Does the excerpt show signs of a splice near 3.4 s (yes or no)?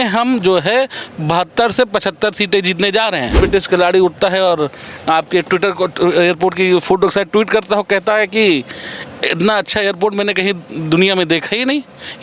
yes